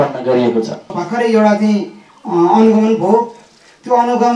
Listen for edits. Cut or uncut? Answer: cut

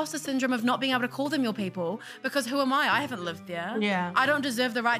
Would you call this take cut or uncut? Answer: uncut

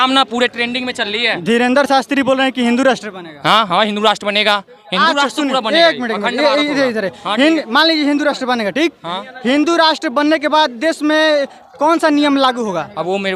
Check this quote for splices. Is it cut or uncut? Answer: uncut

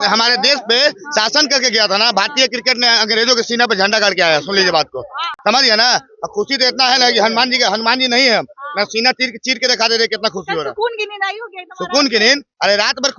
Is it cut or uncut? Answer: uncut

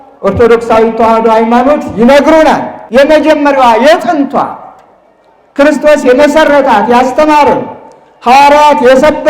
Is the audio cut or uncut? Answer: cut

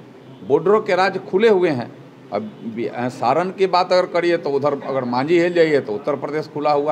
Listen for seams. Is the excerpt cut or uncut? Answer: uncut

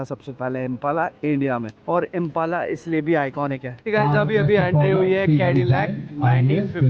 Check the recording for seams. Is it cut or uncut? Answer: cut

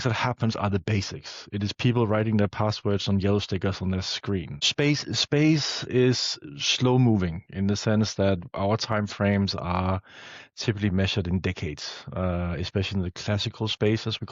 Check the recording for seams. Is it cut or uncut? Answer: cut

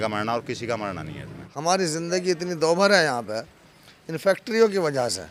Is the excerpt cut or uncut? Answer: uncut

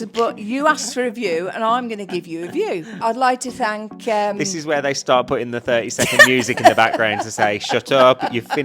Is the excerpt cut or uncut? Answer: cut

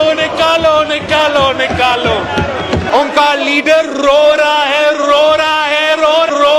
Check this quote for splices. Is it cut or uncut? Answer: uncut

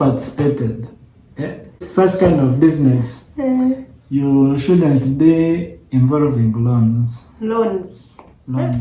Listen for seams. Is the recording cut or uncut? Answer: cut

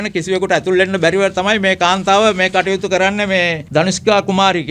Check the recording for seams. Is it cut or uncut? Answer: cut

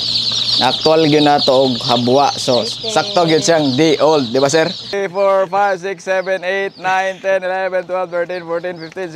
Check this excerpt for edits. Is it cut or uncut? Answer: cut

